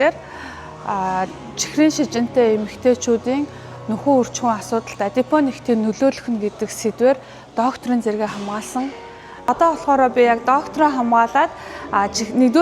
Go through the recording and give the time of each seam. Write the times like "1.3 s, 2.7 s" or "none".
9.5 s

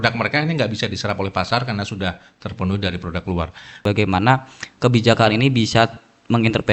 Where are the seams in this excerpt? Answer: 3.8 s

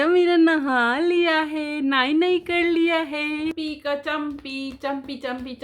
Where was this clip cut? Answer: 3.5 s

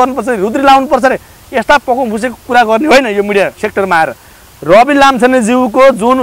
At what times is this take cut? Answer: 4.3 s

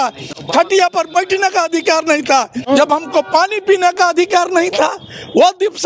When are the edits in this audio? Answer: 2.6 s

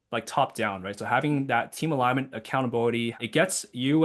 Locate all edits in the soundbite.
3.1 s

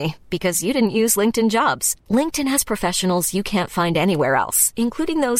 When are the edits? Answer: none

